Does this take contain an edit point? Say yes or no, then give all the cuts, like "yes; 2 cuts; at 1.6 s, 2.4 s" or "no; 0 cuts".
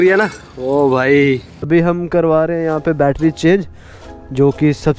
yes; 1 cut; at 1.7 s